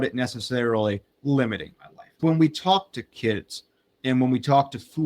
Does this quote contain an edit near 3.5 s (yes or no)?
no